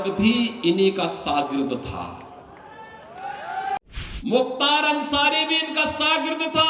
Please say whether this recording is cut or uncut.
cut